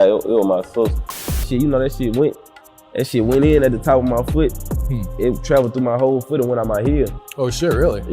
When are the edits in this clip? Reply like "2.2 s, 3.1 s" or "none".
1.2 s